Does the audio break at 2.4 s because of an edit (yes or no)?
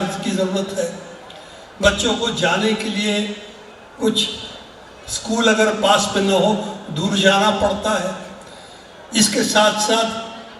no